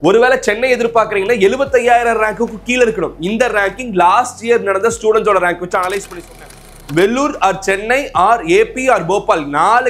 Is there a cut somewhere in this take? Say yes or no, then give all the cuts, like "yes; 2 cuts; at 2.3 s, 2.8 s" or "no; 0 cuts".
yes; 1 cut; at 6.3 s